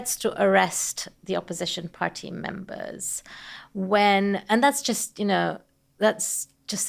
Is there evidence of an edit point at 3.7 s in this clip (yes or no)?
no